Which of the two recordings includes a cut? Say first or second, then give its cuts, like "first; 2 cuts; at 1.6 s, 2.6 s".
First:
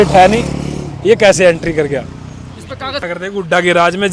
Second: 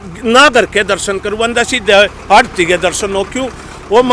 first; 1 cut; at 3.0 s